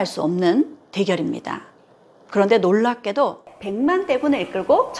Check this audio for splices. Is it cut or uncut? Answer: cut